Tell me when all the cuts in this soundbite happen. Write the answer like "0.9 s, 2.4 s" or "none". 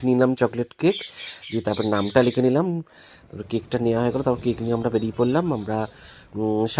none